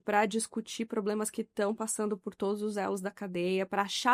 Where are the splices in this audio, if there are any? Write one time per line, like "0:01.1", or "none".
none